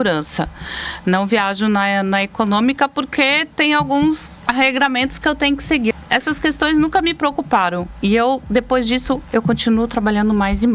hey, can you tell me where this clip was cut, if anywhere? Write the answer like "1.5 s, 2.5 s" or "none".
6.0 s